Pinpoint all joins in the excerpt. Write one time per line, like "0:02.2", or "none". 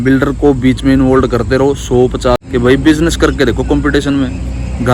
0:02.4